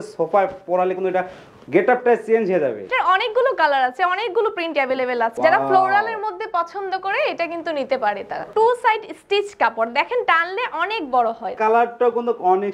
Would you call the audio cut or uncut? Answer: cut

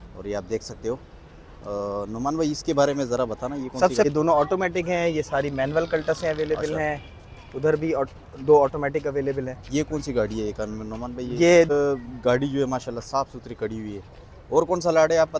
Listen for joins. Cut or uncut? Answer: cut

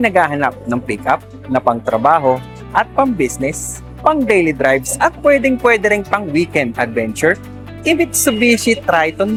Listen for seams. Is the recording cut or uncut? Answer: uncut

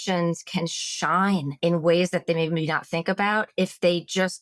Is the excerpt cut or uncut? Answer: cut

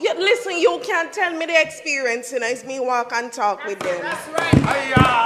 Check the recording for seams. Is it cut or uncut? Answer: uncut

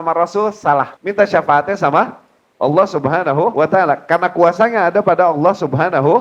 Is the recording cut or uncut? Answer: cut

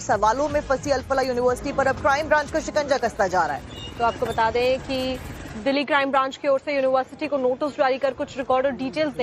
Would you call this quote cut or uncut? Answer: uncut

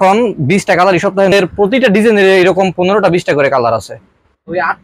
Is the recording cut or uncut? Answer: cut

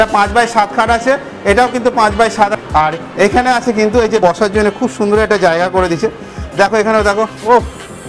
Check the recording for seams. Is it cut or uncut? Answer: cut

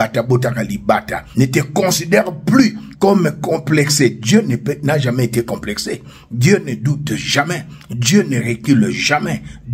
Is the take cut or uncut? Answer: cut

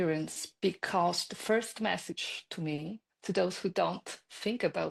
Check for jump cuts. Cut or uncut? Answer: uncut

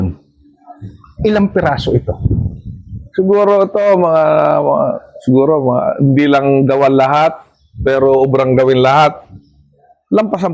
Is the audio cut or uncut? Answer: uncut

